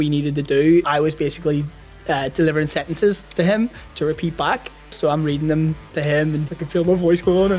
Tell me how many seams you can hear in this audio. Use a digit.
3